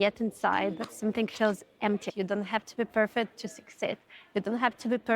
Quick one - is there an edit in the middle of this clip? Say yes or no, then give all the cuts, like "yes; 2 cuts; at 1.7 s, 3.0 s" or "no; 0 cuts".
yes; 1 cut; at 2.1 s